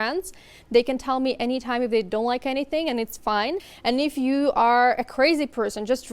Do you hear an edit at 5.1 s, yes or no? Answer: no